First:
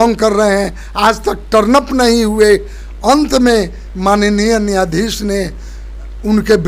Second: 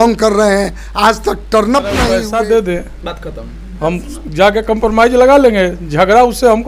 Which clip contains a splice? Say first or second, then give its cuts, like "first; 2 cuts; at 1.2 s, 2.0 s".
second; 1 cut; at 2.1 s